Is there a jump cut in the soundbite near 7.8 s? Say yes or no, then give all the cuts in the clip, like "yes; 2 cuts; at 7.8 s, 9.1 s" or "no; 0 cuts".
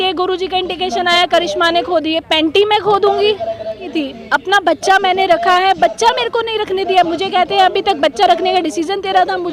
no; 1 cut; at 3.9 s